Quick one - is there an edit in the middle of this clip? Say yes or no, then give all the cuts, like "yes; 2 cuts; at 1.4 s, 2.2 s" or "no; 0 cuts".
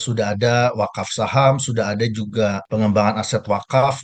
no; 0 cuts